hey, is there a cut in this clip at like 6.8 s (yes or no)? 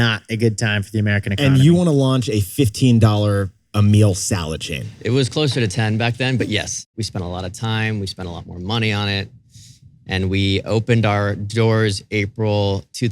yes